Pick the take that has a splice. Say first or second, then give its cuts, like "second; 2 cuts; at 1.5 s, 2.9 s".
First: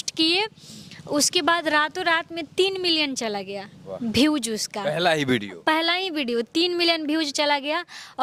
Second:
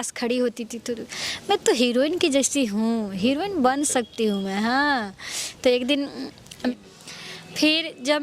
second; 1 cut; at 6.7 s